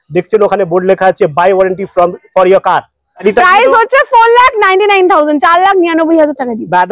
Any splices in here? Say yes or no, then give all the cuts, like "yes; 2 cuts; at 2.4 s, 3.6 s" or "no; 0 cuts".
yes; 1 cut; at 3.2 s